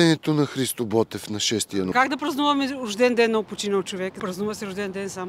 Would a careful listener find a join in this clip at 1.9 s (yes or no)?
yes